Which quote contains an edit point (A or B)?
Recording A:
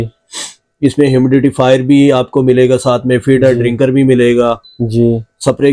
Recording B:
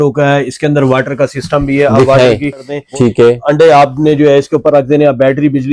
B